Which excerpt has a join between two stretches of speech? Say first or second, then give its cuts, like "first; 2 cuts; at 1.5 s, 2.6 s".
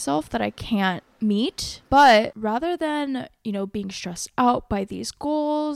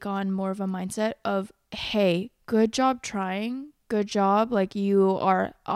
first; 2 cuts; at 1.1 s, 2.3 s